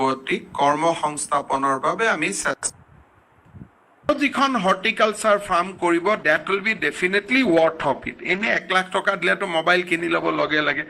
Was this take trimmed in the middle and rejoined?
yes; 1 cut; at 4.1 s

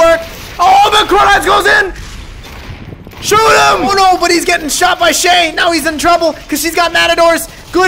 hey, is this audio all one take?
no; 1 cut; at 3.9 s

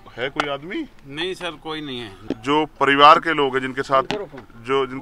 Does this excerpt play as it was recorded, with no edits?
yes; 0 cuts

